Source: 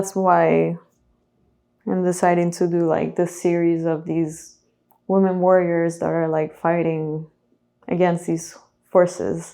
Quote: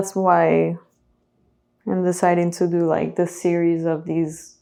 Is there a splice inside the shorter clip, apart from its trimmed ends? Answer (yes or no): no